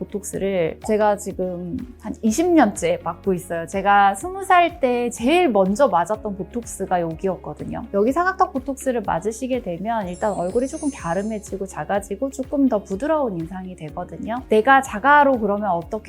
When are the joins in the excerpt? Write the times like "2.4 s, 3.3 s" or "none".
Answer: 14.4 s